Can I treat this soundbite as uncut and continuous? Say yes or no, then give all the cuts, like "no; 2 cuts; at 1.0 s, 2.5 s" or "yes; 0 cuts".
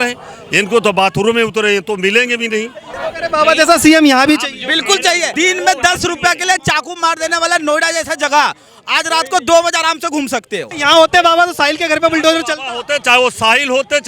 no; 3 cuts; at 2.9 s, 5.3 s, 10.7 s